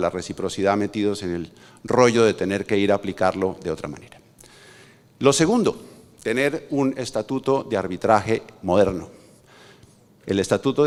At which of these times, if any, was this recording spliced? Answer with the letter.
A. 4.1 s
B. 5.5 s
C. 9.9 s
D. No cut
D